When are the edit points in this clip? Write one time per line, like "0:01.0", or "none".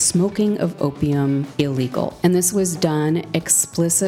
0:01.9